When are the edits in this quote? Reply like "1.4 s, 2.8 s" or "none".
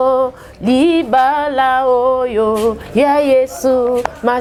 none

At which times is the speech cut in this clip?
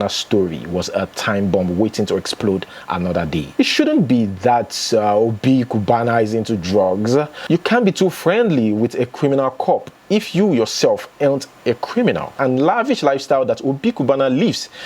3.5 s, 12.3 s

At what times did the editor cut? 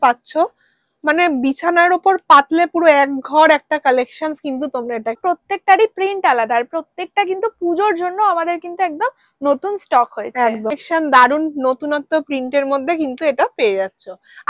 5.2 s, 10.8 s

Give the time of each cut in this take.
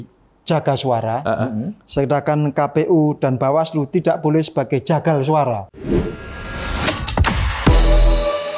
5.6 s

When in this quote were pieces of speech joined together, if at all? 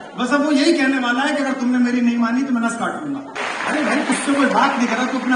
3.4 s

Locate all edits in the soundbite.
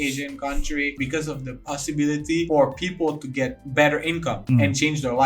0.9 s, 2.5 s, 3.6 s, 4.4 s

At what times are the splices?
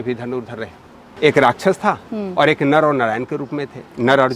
1.1 s

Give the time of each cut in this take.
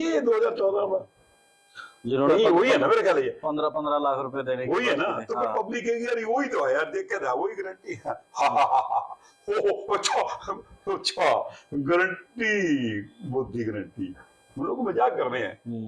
none

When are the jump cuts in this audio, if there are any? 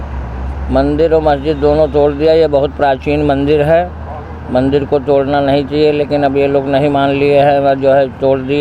none

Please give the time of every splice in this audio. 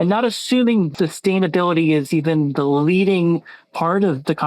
0.9 s

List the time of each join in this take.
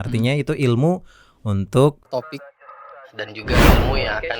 2.0 s

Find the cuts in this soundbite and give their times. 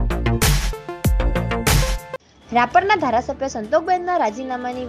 2.0 s

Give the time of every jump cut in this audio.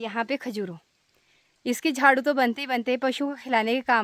none

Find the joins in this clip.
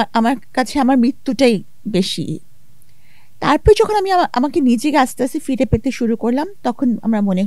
none

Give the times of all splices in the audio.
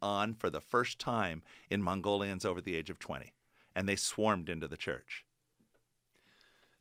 none

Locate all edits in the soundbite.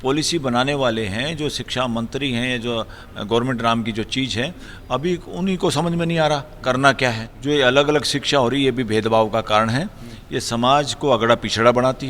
7.3 s

